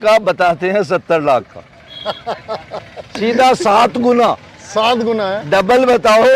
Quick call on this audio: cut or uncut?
uncut